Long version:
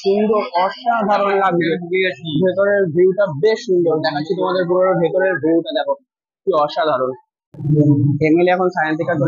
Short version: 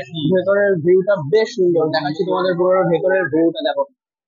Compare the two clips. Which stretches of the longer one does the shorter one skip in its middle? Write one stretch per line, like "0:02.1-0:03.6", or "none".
none